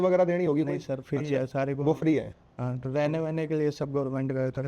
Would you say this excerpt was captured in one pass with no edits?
yes; 0 cuts

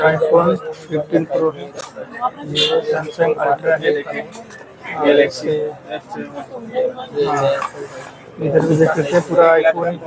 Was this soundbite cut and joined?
no; 0 cuts

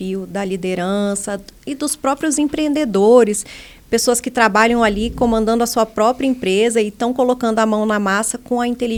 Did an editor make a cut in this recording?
no; 0 cuts

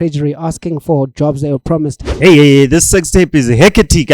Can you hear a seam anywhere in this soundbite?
yes; 1 cut; at 2.1 s

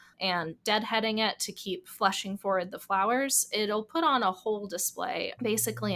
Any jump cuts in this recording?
no; 0 cuts

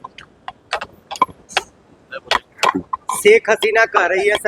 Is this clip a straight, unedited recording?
yes; 0 cuts

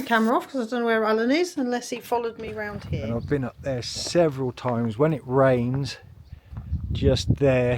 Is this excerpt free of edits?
no; 1 cut; at 2.8 s

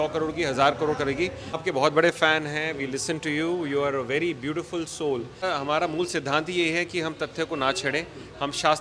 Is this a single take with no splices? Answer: no; 2 cuts; at 1.6 s, 5.4 s

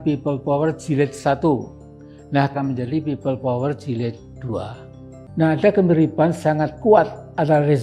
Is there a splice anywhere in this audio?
yes; 2 cuts; at 2.5 s, 5.2 s

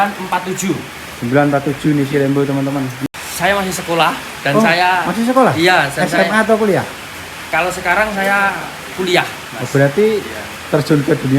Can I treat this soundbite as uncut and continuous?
no; 1 cut; at 3.0 s

